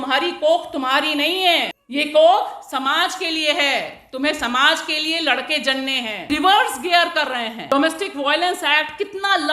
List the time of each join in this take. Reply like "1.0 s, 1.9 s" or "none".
1.8 s, 6.3 s, 7.6 s

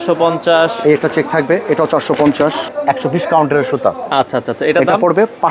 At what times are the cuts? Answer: 2.7 s

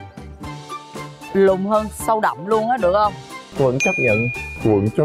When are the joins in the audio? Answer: none

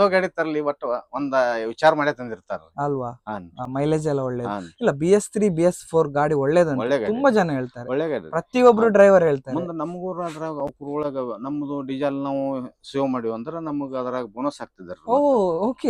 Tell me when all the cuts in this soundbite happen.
none

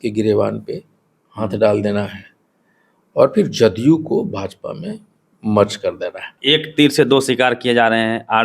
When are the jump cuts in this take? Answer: 6.3 s

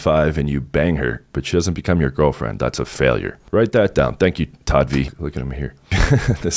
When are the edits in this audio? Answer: 5.1 s

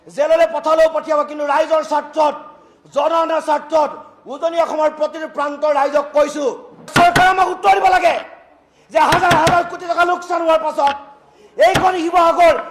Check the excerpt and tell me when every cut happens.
6.9 s

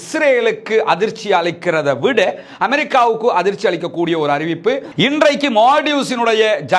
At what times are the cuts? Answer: 4.9 s

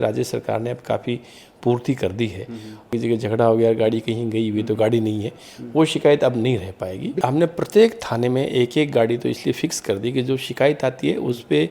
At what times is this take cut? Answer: 2.9 s, 7.2 s

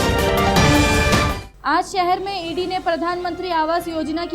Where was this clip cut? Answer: 1.5 s

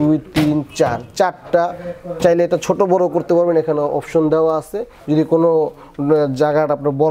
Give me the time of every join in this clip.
none

